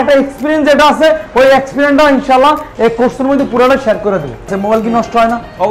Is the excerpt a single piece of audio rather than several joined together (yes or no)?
no